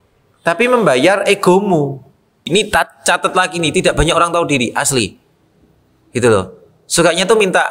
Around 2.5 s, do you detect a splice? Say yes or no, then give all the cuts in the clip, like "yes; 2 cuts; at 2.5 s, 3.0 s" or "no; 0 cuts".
yes; 1 cut; at 2.5 s